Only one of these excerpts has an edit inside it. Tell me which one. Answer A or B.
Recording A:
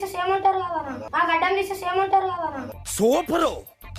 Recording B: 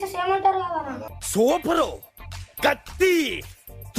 B